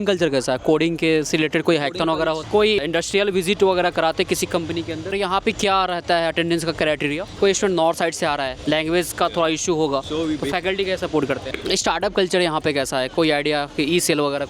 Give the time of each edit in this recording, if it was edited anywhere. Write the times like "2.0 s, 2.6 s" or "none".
2.4 s, 5.1 s, 7.3 s, 8.5 s, 11.5 s